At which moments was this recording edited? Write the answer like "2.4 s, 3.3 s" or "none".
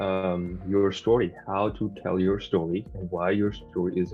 none